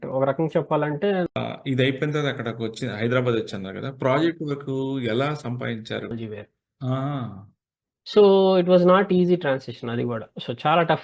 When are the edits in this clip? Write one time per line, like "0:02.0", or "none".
0:01.3
0:06.1